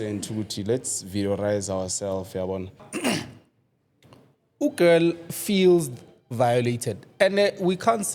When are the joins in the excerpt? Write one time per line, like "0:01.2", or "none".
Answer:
0:02.9